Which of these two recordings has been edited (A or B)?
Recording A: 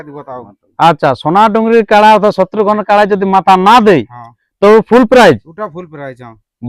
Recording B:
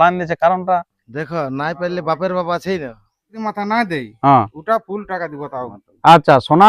B